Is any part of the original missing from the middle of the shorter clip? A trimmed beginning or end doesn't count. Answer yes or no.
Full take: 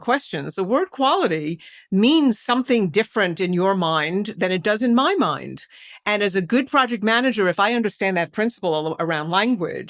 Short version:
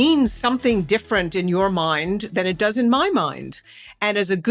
no